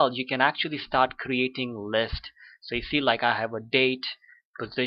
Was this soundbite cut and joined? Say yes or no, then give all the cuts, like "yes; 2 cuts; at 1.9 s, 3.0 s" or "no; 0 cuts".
yes; 1 cut; at 3.9 s